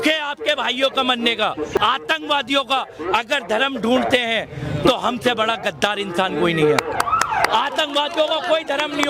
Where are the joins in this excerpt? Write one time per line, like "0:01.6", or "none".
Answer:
0:01.8